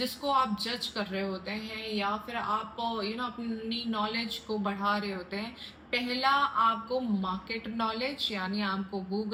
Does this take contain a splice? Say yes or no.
no